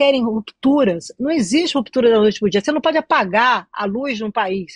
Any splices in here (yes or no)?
no